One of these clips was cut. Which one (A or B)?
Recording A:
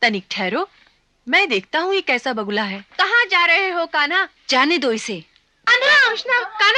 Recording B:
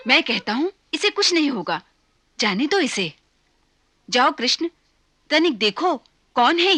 A